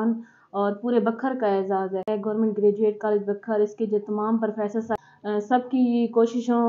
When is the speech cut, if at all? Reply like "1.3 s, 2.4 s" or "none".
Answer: 2.1 s, 4.9 s

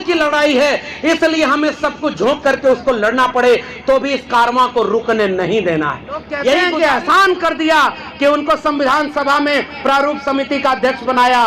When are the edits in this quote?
6.7 s

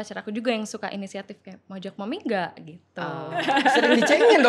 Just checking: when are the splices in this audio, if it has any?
3.4 s

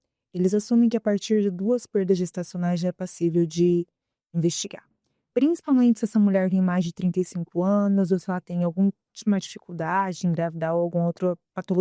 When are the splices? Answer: none

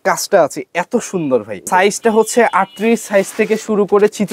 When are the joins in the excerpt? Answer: 1.6 s

